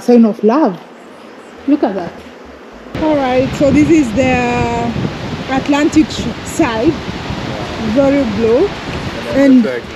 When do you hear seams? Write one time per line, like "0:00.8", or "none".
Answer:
0:02.8